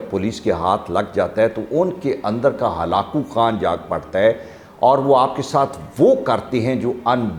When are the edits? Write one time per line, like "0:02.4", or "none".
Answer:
none

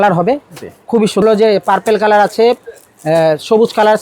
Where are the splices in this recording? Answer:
0:01.2

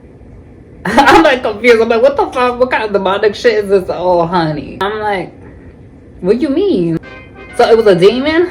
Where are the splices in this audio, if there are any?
0:04.8
0:07.0

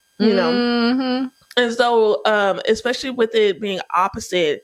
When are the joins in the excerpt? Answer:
none

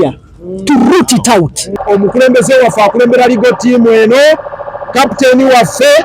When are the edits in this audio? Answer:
0:01.7

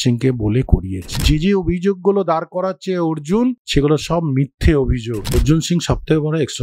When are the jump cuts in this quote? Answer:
0:01.2
0:03.6
0:05.3

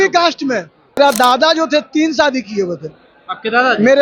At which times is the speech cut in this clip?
0:01.0

